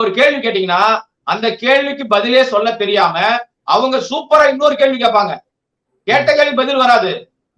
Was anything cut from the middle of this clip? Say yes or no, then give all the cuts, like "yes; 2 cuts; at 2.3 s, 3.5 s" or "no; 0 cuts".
no; 0 cuts